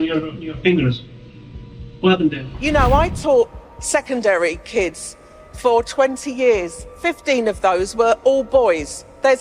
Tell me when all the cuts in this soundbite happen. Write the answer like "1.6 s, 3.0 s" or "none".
2.5 s